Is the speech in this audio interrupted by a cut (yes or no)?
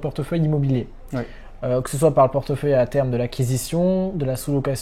no